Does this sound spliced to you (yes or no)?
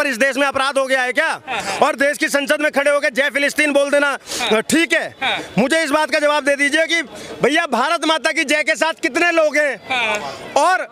no